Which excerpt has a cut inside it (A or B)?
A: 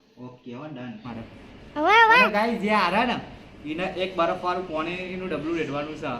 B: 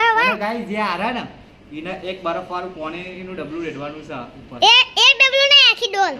A